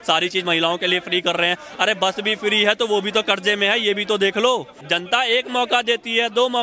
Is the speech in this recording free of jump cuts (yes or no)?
yes